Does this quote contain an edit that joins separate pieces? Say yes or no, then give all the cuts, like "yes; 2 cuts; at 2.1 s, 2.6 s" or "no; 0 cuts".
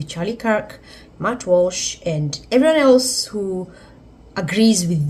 no; 0 cuts